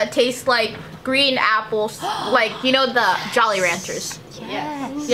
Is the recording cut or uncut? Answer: uncut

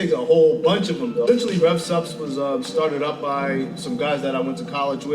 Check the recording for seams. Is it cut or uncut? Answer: cut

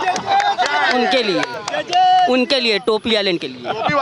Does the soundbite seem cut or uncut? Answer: uncut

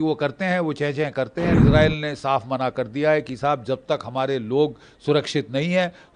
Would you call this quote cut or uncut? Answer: cut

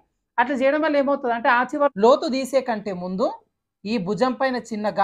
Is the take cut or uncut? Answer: cut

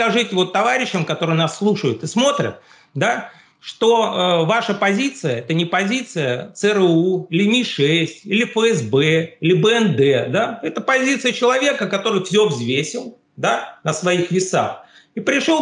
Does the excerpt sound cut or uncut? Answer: uncut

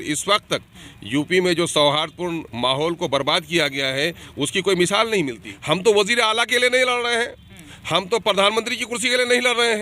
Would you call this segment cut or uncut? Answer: cut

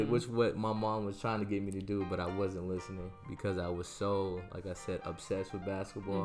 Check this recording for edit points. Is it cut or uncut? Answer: uncut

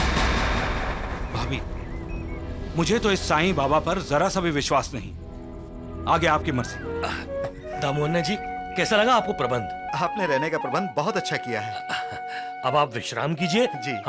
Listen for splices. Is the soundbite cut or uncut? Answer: uncut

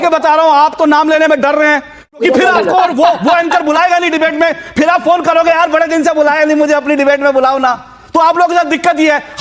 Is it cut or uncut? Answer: cut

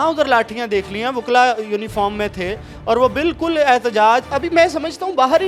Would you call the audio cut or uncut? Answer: uncut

